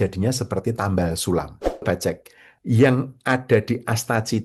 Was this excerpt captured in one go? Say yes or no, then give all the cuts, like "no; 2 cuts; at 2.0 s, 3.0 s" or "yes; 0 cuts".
no; 1 cut; at 1.8 s